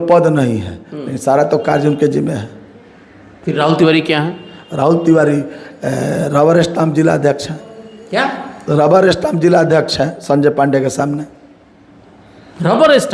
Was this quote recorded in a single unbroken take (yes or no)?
yes